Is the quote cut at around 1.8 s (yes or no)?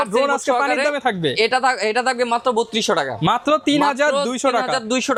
no